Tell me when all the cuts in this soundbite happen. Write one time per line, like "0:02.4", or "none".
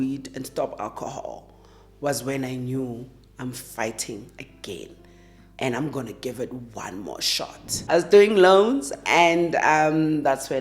0:08.0